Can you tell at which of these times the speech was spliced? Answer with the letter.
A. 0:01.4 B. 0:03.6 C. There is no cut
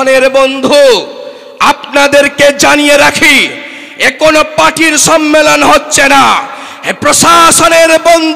C